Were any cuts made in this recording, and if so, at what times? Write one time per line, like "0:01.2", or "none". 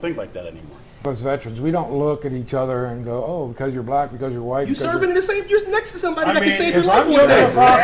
0:01.0